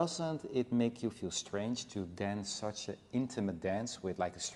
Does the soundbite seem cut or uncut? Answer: uncut